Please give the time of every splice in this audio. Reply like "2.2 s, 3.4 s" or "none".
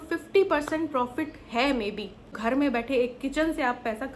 2.3 s